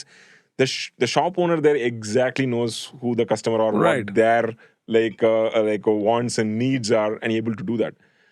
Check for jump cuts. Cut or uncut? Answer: uncut